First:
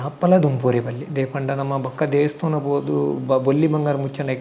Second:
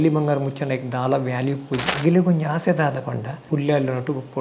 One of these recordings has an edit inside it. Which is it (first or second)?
second